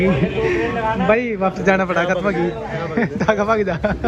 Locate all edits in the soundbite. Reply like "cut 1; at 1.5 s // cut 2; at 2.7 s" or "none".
none

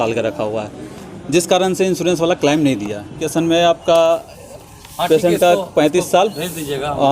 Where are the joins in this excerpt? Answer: cut 1; at 3.2 s

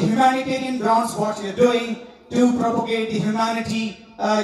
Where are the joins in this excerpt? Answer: none

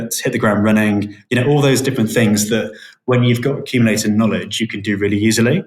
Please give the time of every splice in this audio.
none

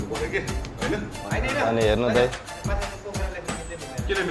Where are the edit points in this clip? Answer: cut 1; at 1.2 s

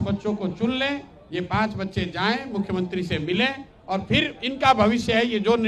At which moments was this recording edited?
none

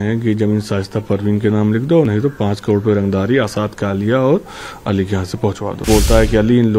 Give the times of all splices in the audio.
cut 1; at 5.9 s

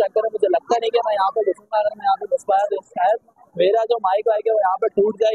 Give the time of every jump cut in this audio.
none

